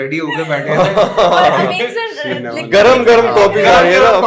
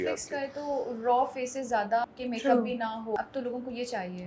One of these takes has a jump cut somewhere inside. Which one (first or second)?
second